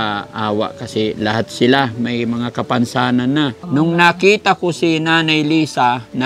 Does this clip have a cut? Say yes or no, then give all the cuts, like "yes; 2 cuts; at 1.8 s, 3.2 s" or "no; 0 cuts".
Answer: yes; 1 cut; at 3.6 s